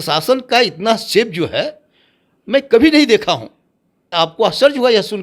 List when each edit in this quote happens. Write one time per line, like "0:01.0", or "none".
0:04.1